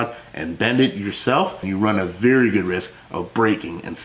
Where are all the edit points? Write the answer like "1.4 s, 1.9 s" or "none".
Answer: none